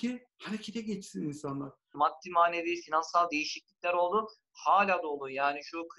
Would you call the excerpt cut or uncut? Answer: cut